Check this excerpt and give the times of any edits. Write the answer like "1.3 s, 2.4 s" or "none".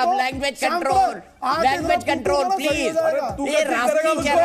none